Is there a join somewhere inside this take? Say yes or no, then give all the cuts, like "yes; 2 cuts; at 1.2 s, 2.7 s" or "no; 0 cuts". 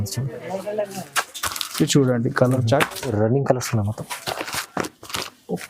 yes; 1 cut; at 3.1 s